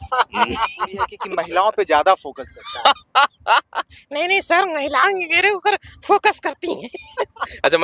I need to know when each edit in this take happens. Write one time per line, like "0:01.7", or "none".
0:01.2

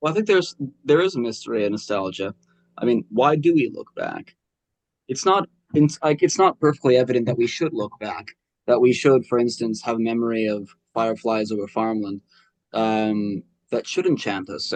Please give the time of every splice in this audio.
none

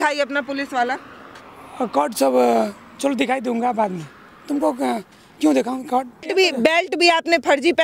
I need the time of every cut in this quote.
0:06.3

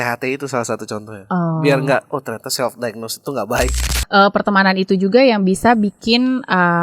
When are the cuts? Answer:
0:03.8

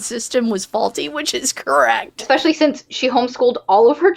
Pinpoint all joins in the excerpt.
0:02.2

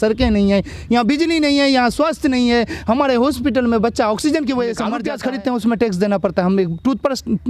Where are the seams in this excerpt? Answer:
0:05.0

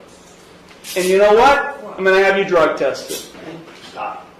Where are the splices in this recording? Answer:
0:03.3

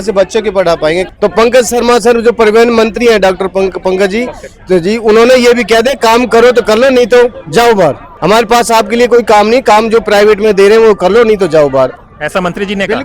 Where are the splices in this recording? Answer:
0:01.1
0:08.1
0:12.0

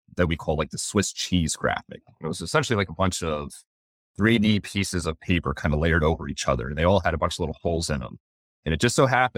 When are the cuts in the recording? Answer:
none

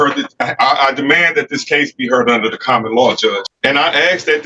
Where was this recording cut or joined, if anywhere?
0:03.4

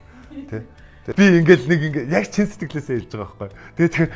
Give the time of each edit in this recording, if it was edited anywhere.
0:01.1

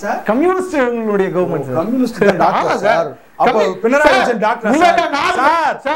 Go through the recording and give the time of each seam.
none

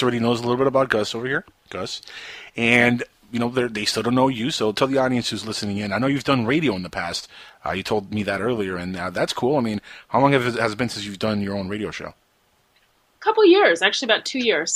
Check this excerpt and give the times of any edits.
none

